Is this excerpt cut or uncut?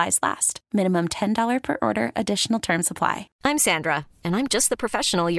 cut